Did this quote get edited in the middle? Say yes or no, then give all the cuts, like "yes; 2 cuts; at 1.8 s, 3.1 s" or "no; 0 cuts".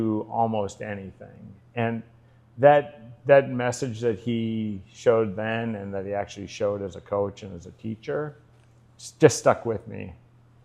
no; 0 cuts